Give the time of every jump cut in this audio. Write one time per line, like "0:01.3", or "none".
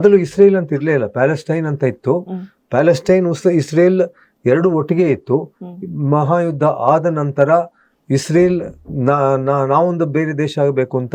none